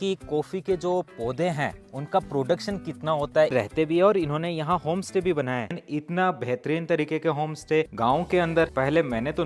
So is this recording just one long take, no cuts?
no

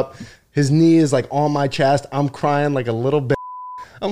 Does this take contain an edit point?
no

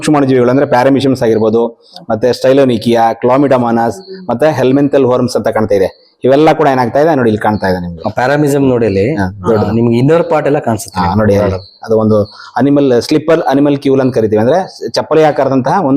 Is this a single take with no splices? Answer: yes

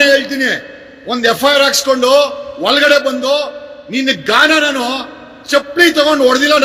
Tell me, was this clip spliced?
no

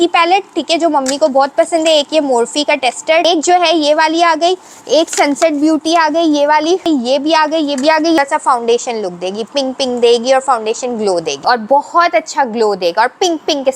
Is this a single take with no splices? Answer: no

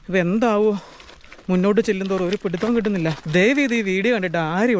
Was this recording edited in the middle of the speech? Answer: yes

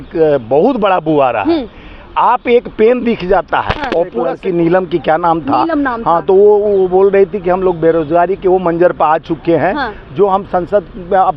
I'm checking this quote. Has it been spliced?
yes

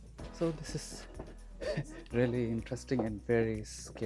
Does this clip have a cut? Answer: no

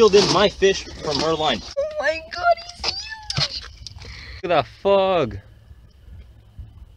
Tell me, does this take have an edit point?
yes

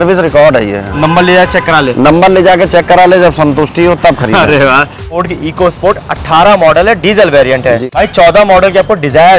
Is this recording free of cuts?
no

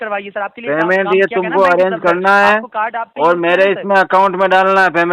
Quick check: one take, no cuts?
yes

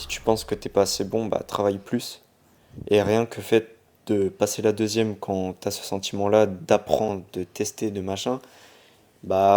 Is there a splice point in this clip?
no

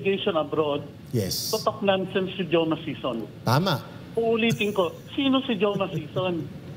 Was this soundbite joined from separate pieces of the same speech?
no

